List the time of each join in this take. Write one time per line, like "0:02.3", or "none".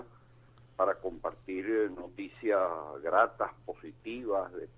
0:01.3